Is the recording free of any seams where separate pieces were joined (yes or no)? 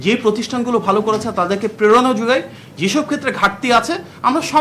yes